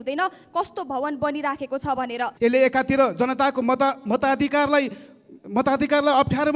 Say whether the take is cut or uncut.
cut